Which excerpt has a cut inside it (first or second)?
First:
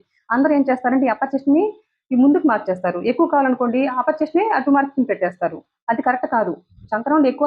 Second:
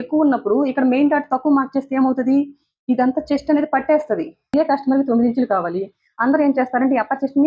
second